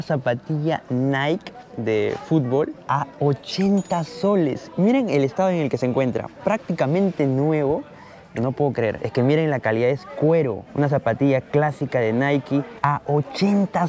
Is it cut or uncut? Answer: cut